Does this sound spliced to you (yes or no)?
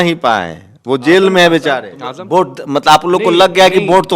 yes